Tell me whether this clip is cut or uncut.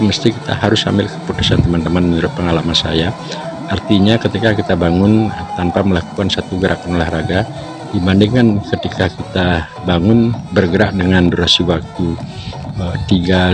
uncut